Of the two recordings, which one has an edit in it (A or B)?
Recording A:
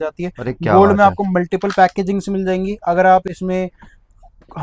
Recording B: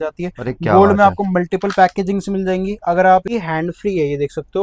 B